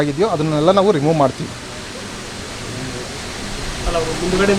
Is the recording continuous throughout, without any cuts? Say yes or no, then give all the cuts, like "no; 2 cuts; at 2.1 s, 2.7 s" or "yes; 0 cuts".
yes; 0 cuts